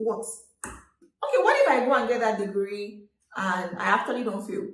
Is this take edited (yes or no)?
yes